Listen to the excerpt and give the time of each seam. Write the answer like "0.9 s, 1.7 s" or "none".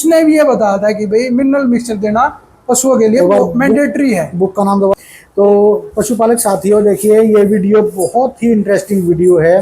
4.9 s